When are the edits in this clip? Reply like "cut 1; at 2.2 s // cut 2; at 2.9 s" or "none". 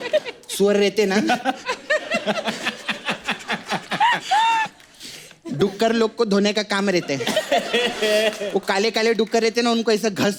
none